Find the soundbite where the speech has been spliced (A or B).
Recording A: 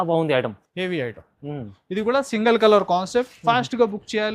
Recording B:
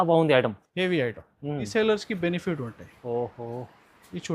B